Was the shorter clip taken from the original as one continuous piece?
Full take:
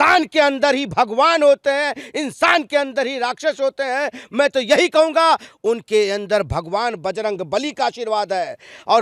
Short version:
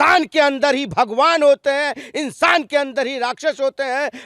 yes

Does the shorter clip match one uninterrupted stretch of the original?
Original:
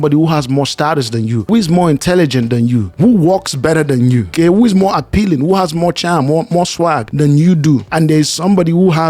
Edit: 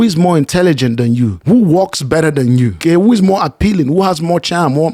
yes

